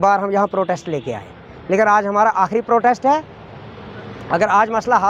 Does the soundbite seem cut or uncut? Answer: uncut